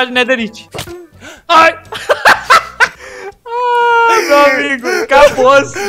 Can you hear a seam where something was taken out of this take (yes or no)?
no